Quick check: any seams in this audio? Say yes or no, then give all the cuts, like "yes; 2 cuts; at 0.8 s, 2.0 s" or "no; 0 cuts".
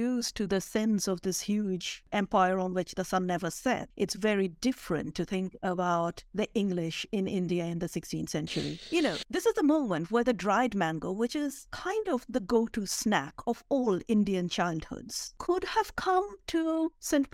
yes; 4 cuts; at 2.0 s, 3.9 s, 8.8 s, 15.2 s